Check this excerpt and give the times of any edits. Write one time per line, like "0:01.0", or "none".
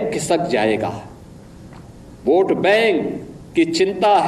none